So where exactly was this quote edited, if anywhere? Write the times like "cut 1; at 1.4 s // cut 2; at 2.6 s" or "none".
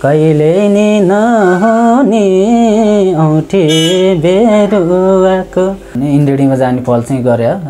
cut 1; at 5.9 s